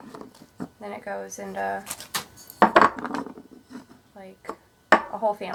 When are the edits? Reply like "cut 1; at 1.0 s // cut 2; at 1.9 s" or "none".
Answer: none